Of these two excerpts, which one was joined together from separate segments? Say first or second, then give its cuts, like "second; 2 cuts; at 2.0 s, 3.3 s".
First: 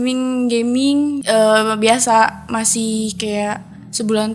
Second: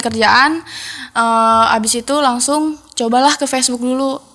first; 1 cut; at 1.2 s